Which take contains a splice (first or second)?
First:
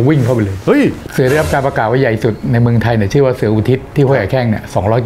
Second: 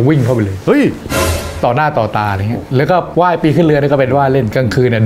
first